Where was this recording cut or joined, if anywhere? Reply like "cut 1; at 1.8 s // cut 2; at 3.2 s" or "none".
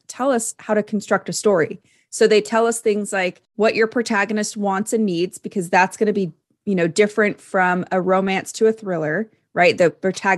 cut 1; at 3.4 s